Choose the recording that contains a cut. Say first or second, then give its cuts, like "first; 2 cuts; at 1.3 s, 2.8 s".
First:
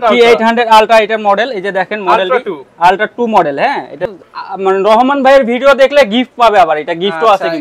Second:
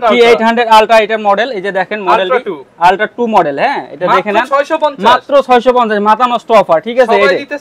first; 1 cut; at 4.1 s